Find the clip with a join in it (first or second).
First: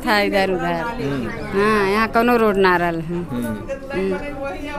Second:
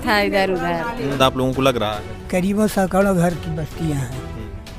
second